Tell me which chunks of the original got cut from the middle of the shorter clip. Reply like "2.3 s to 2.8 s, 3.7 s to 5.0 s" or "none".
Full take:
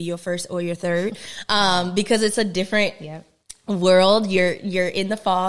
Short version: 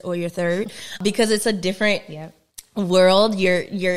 1.4 s to 1.9 s